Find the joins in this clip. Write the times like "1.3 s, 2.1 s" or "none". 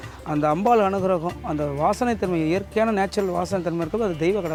none